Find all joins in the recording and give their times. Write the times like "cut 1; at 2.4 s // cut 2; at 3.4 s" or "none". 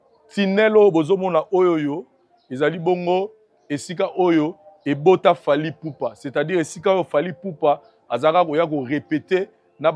none